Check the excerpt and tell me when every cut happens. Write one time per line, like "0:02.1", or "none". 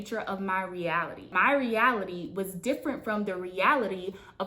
0:01.3